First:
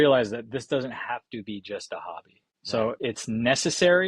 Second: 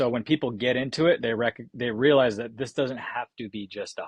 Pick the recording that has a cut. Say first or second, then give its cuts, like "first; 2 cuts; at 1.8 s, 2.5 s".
first; 1 cut; at 2.9 s